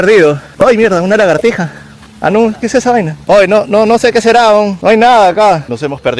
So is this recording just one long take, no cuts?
yes; 0 cuts

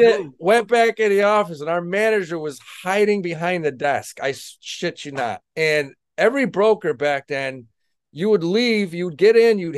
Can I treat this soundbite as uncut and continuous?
no; 1 cut; at 5.5 s

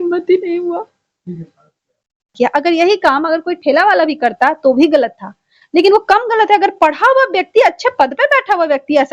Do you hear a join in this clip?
yes; 1 cut; at 2.3 s

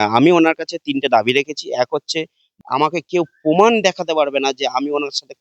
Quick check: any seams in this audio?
yes; 1 cut; at 2.4 s

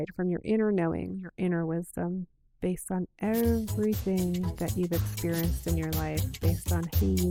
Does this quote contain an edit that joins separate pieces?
no; 0 cuts

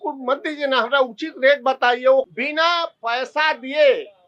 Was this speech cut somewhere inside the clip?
yes; 1 cut; at 2.4 s

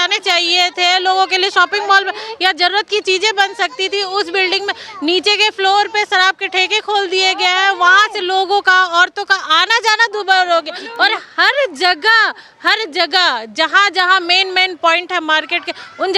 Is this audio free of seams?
yes; 0 cuts

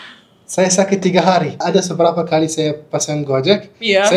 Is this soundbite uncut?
no; 1 cut; at 1.6 s

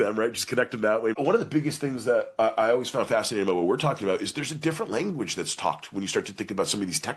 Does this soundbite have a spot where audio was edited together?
yes; 1 cut; at 1.1 s

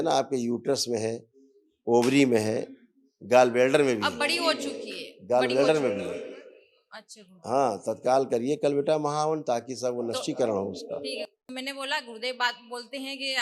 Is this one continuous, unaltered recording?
no; 1 cut; at 11.4 s

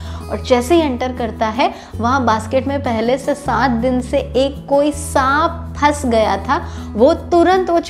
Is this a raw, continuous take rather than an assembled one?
yes; 0 cuts

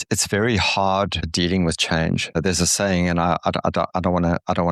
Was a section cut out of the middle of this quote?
yes; 2 cuts; at 1.3 s, 2.4 s

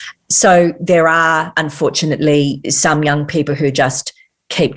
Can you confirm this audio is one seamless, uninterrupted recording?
no; 2 cuts; at 1.6 s, 2.7 s

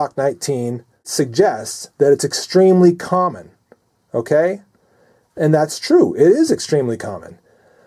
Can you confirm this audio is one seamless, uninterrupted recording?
no; 1 cut; at 1.0 s

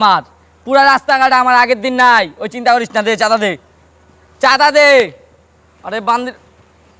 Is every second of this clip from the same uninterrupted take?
yes; 0 cuts

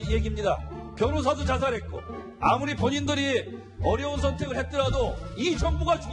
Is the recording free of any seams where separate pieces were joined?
no; 1 cut; at 4.1 s

